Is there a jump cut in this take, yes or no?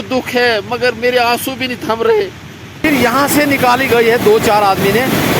yes